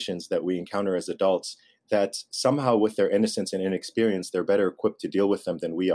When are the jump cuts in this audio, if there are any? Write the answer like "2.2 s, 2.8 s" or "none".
none